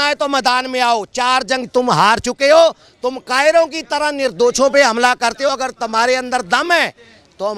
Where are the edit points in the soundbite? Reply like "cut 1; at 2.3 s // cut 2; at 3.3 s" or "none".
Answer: none